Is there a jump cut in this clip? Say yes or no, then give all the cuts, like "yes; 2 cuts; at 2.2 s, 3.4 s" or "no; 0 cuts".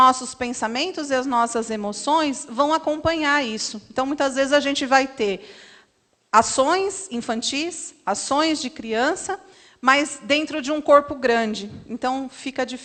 no; 0 cuts